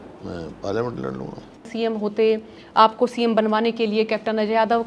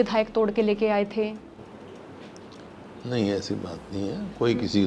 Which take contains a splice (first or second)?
first